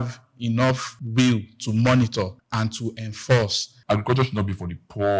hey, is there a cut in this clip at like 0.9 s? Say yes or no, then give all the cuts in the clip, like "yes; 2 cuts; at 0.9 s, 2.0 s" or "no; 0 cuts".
yes; 3 cuts; at 0.9 s, 2.4 s, 3.7 s